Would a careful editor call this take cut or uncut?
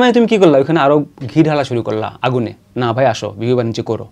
uncut